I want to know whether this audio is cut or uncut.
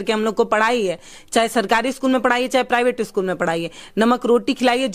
uncut